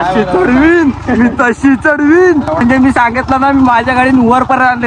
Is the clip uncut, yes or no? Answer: no